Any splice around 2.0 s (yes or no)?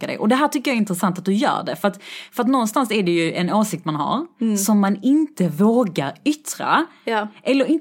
no